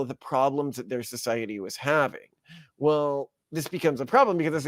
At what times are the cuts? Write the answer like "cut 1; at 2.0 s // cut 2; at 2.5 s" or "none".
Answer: none